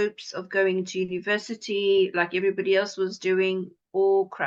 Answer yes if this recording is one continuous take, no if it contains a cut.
yes